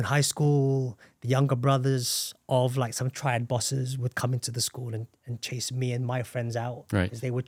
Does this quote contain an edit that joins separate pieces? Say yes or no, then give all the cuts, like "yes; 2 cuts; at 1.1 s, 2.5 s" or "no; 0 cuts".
no; 0 cuts